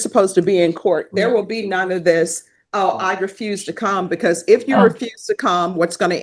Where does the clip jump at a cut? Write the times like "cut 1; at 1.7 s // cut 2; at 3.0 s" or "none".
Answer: none